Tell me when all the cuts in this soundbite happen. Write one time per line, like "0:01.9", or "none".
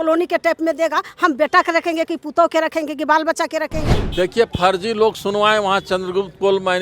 0:04.0